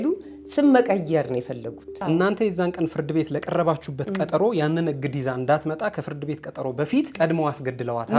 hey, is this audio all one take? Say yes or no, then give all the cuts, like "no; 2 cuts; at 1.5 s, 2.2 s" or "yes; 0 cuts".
no; 2 cuts; at 1.9 s, 7.1 s